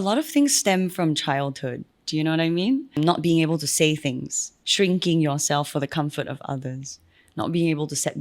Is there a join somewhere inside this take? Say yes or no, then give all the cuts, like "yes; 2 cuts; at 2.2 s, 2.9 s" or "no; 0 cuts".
yes; 1 cut; at 2.9 s